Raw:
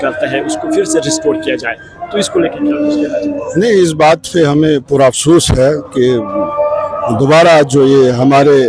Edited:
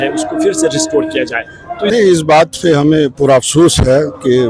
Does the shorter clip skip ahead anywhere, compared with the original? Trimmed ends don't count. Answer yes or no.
yes